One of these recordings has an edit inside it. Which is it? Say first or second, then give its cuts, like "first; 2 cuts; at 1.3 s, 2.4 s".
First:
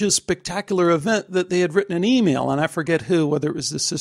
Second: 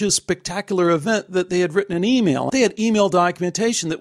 second; 1 cut; at 2.5 s